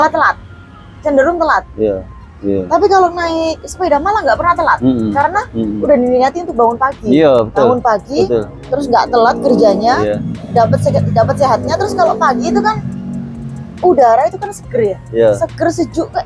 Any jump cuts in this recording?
no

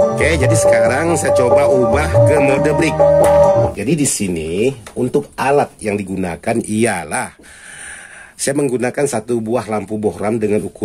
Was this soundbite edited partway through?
yes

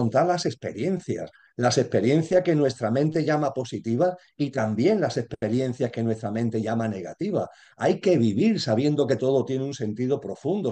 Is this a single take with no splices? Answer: yes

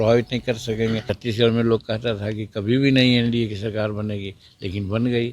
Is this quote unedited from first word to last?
no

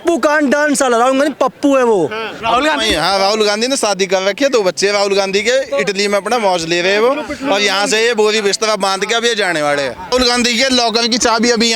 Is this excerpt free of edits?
no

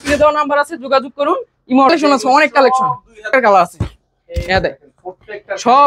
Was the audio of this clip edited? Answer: yes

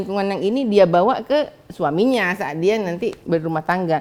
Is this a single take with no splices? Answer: yes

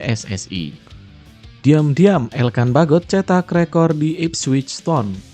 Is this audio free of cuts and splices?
no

